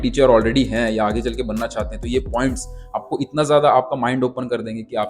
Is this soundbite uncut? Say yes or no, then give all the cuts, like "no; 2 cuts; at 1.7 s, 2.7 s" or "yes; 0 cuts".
yes; 0 cuts